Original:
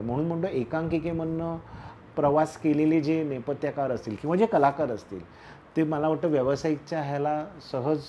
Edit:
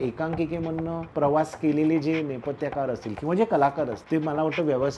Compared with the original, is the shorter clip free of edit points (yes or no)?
no